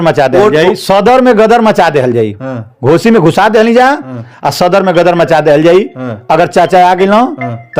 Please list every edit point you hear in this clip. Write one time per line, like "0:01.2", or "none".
none

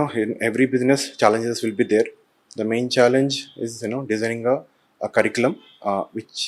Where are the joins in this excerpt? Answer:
none

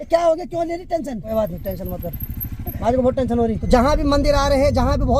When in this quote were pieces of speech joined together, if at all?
0:01.3
0:03.6

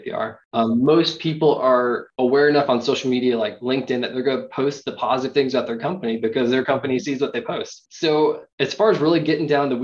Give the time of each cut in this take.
0:02.0

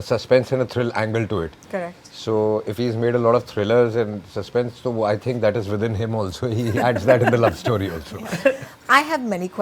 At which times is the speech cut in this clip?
none

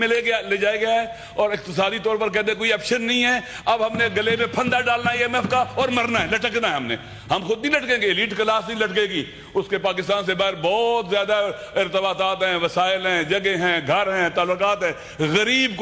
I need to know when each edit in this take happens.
none

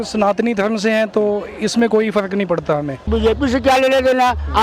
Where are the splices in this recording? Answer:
0:03.1

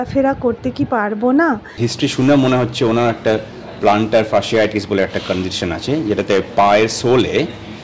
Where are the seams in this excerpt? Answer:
0:01.8

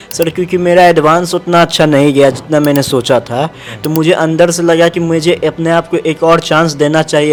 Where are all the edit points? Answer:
none

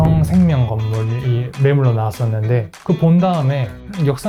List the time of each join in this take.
none

